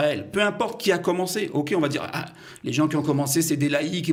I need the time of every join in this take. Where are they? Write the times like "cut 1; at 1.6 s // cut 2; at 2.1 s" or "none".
none

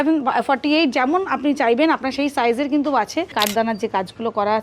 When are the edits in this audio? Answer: cut 1; at 3.4 s

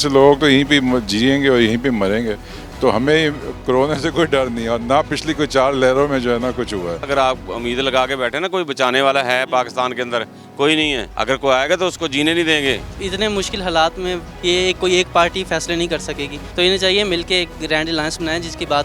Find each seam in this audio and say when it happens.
cut 1; at 7.1 s // cut 2; at 11.1 s // cut 3; at 12.9 s // cut 4; at 16.3 s

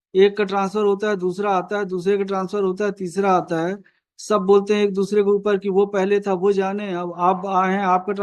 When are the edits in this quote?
none

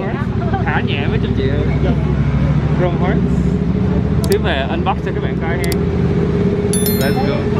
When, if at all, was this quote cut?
none

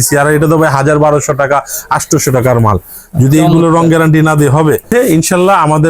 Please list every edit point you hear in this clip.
cut 1; at 4.9 s

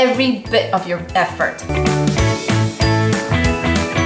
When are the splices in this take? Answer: cut 1; at 1.7 s

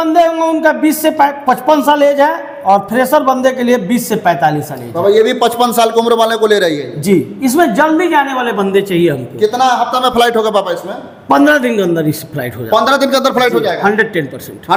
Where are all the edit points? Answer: none

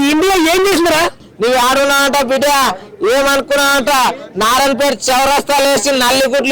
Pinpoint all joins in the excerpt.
cut 1; at 1.2 s

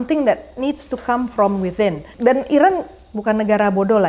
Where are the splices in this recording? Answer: cut 1; at 2.1 s

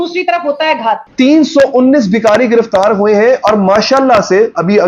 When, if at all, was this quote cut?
cut 1; at 1.0 s

